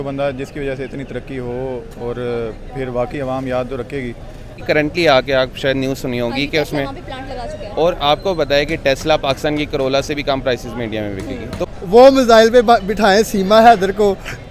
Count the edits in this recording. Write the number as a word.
two